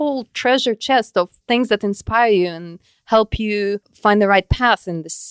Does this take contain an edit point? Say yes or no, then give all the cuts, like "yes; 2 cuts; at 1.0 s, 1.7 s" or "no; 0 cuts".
yes; 2 cuts; at 1.4 s, 3.9 s